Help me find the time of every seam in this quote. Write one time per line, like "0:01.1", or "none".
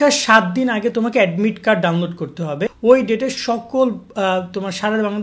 0:02.7